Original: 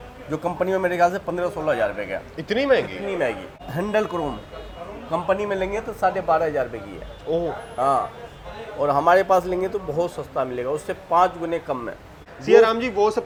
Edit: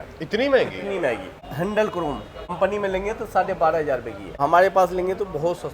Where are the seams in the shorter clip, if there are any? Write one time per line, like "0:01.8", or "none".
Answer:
0:02.5
0:04.4